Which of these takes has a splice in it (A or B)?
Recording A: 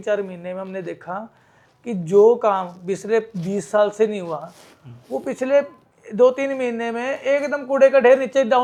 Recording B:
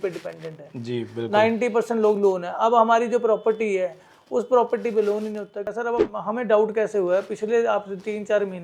B